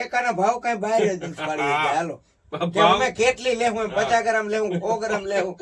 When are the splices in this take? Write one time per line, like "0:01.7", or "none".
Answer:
none